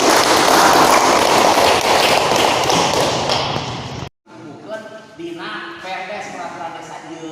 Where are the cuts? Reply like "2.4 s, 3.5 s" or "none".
4.2 s